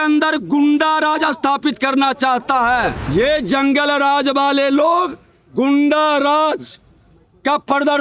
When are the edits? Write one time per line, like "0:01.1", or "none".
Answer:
0:03.0